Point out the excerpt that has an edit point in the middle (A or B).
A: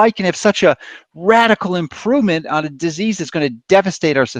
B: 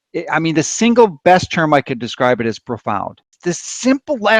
B